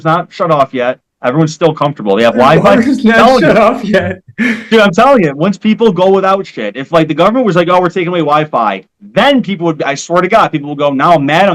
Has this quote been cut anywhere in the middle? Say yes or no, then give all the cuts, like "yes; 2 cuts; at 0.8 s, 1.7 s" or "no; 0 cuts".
no; 0 cuts